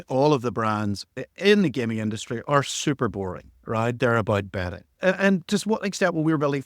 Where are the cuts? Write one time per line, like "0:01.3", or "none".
0:04.0